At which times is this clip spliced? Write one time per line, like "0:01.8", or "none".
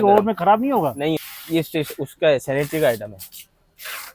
0:01.2